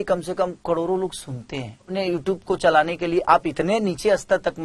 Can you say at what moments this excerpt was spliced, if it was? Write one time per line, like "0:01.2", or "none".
0:01.9